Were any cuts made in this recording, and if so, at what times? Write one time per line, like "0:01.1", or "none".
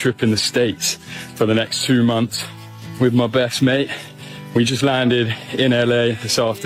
none